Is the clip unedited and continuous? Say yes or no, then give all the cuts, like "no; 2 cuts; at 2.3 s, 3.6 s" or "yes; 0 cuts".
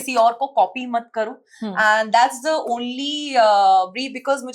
yes; 0 cuts